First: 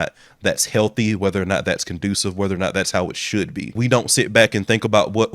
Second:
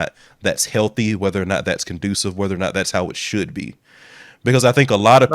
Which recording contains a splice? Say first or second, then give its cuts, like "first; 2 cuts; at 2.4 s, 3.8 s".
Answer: first; 1 cut; at 3.8 s